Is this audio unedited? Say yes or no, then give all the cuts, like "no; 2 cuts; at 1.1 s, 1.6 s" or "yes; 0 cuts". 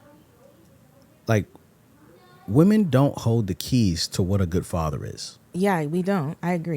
no; 1 cut; at 5.4 s